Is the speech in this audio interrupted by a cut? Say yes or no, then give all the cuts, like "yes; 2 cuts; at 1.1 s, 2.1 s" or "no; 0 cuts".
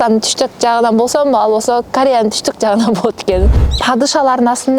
yes; 1 cut; at 3.6 s